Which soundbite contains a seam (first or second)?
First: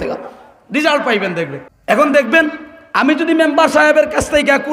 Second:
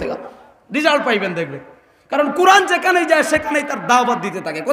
first